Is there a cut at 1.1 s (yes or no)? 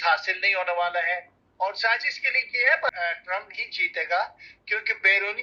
no